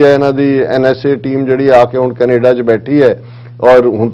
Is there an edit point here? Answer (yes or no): no